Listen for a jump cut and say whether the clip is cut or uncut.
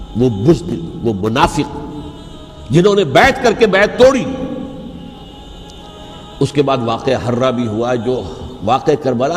cut